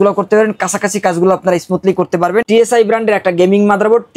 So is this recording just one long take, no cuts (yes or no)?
no